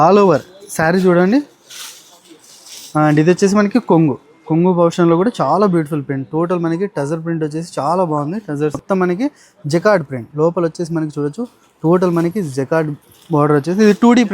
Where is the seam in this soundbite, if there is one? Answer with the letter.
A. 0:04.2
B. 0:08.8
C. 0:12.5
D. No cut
B